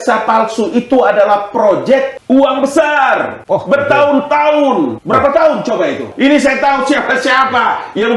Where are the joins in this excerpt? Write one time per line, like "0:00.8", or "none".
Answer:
0:02.1
0:03.3
0:05.0
0:06.1